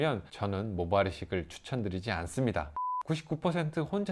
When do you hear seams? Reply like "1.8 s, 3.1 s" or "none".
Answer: 2.8 s